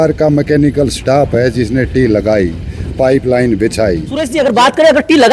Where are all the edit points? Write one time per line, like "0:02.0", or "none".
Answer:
0:04.2